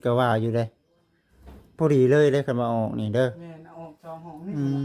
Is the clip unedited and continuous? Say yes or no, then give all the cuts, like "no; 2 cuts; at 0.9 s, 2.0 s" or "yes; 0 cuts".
yes; 0 cuts